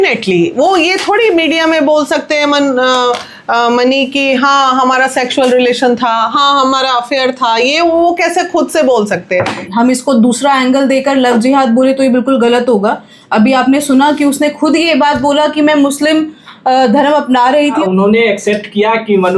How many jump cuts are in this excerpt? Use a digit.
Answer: 2